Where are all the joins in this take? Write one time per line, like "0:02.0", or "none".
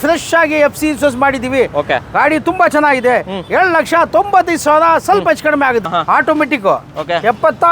0:05.9